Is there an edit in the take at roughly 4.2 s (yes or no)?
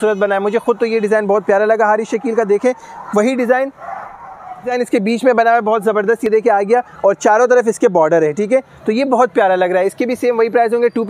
no